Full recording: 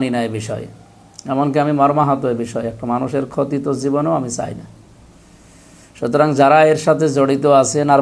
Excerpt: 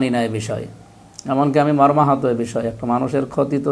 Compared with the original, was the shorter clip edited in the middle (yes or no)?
no